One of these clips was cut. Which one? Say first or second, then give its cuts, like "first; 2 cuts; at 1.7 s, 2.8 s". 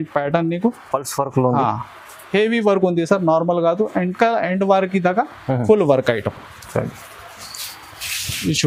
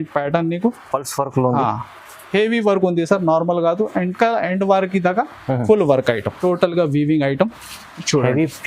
second; 1 cut; at 6.3 s